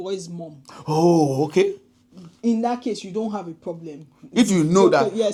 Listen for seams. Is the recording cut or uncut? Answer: uncut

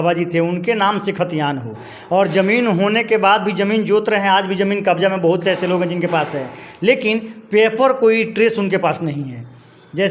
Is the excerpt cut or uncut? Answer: uncut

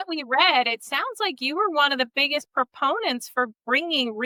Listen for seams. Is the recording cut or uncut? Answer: uncut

